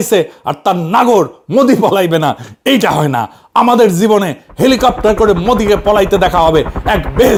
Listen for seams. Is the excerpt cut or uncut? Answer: uncut